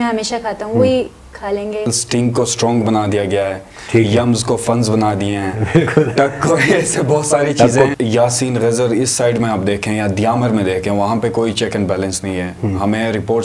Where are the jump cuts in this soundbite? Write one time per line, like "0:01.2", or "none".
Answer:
0:01.9
0:07.9